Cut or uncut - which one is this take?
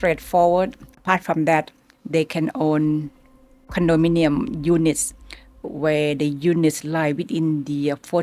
cut